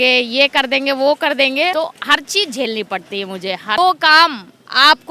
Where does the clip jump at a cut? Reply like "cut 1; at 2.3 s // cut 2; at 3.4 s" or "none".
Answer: cut 1; at 3.8 s